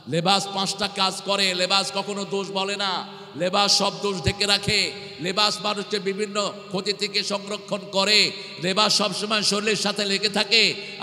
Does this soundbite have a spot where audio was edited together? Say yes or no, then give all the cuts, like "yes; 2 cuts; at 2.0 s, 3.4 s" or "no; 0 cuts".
no; 0 cuts